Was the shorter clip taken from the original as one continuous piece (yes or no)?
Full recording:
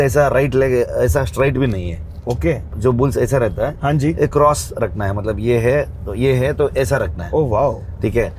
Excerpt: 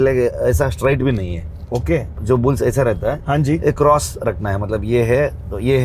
yes